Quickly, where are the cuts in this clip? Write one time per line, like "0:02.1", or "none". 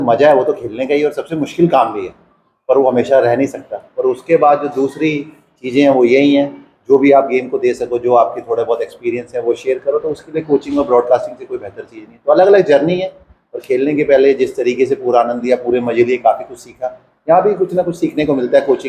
none